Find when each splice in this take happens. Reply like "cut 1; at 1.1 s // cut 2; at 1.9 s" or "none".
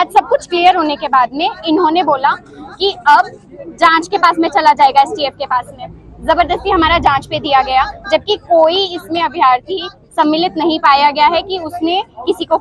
none

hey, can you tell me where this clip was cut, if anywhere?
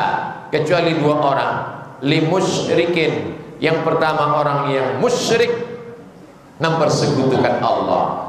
none

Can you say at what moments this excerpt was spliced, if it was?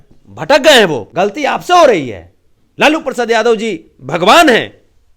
cut 1; at 1.0 s

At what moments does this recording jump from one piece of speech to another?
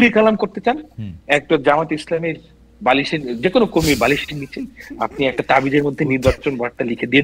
none

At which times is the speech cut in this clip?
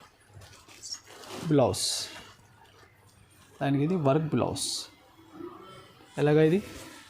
cut 1; at 3.4 s

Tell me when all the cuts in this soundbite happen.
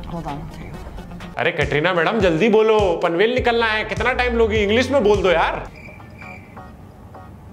none

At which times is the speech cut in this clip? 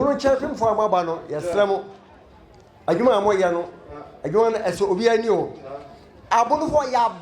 none

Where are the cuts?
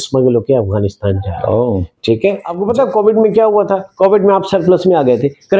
cut 1; at 2.5 s

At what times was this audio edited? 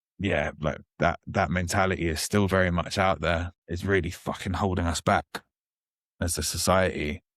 cut 1; at 3.6 s

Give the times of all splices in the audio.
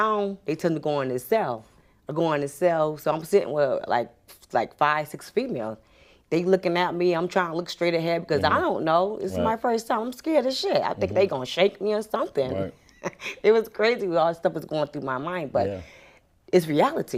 none

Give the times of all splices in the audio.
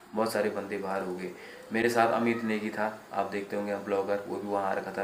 none

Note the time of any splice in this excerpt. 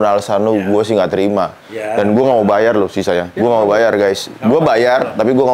cut 1; at 3.3 s

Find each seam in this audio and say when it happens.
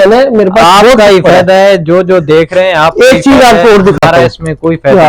none

